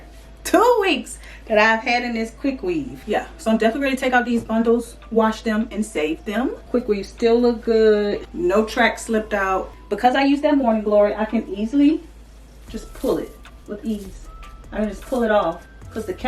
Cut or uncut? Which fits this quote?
cut